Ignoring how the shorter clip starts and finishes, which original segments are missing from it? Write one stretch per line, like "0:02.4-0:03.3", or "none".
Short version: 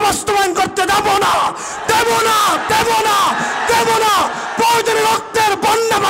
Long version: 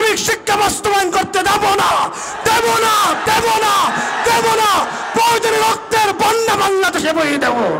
none